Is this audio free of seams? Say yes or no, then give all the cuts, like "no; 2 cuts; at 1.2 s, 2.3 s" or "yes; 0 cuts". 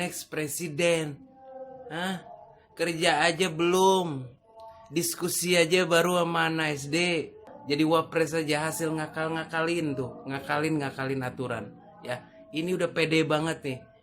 no; 1 cut; at 7.5 s